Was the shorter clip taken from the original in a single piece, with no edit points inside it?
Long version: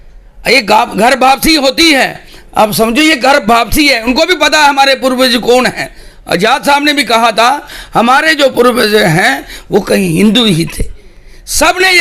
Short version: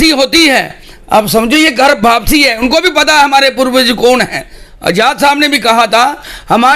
yes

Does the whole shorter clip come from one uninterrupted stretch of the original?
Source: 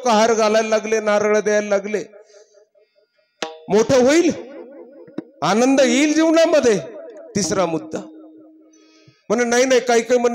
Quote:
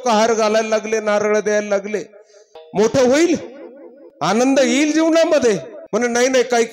no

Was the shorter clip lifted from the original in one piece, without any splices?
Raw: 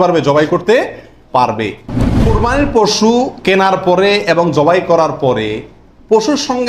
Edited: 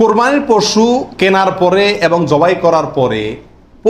yes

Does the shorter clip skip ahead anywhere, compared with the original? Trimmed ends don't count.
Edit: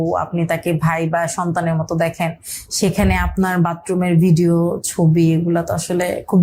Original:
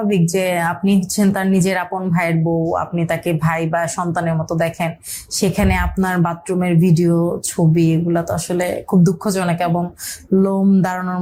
no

